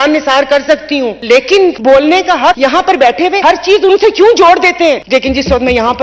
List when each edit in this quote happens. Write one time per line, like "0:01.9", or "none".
0:01.2
0:01.8
0:02.6
0:03.4
0:05.0